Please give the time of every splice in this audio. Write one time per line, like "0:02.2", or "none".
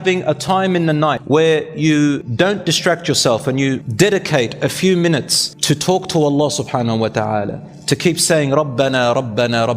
0:01.2
0:02.3
0:03.8